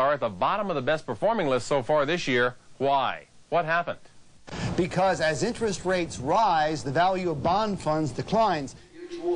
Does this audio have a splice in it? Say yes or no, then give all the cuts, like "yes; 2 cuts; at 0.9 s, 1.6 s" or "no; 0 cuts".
no; 0 cuts